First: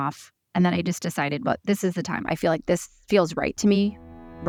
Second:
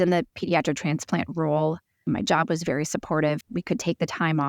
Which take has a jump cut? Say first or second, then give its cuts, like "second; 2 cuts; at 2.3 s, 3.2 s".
second; 2 cuts; at 2.0 s, 3.4 s